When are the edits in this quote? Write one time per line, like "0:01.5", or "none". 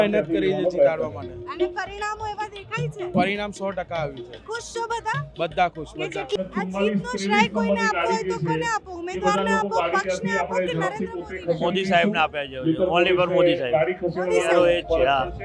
0:06.3